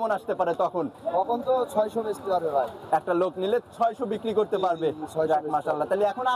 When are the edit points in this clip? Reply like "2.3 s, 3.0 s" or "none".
none